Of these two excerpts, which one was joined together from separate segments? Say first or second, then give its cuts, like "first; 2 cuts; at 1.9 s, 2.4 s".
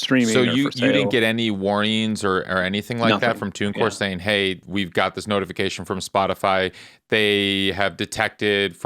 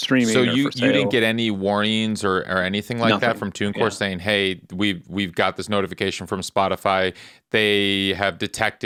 first; 1 cut; at 4.6 s